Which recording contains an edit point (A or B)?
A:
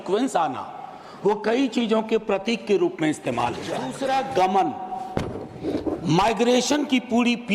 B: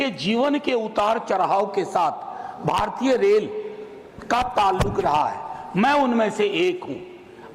A